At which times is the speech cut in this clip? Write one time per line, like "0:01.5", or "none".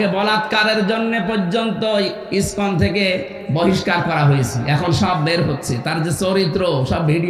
0:03.4